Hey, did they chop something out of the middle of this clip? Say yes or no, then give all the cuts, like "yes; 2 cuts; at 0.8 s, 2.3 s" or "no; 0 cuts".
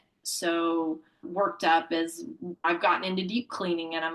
yes; 1 cut; at 2.6 s